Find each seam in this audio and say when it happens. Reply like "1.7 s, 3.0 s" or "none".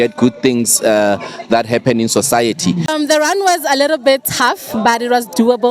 2.9 s